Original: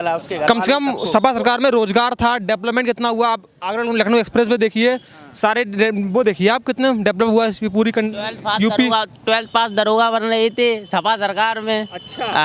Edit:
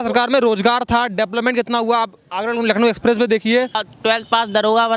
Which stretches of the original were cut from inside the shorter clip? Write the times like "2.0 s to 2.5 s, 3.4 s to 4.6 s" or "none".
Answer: 5.2 s to 9.1 s

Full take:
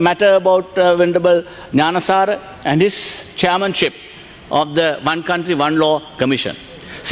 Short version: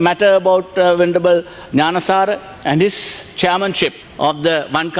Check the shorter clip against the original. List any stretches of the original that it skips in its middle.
4.0 s to 4.4 s

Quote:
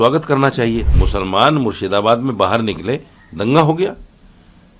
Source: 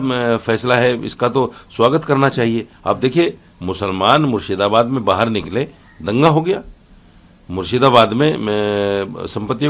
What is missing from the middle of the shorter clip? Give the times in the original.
2.7 s to 3.6 s

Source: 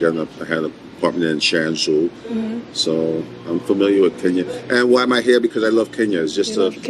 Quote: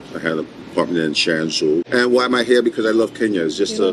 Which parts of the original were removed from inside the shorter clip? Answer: 2.1 s to 4.6 s

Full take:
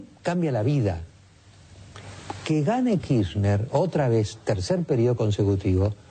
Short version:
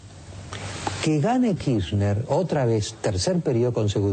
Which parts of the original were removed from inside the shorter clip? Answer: none

